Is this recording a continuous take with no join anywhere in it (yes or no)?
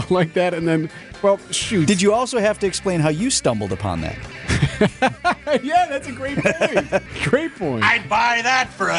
no